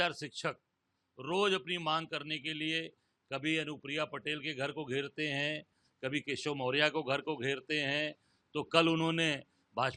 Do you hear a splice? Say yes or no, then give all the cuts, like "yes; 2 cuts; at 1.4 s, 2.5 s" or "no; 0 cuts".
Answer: no; 0 cuts